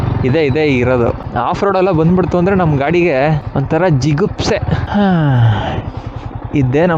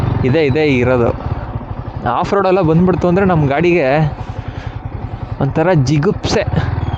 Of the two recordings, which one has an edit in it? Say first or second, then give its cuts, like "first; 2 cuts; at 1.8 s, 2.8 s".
first; 3 cuts; at 1.2 s, 3.5 s, 4.8 s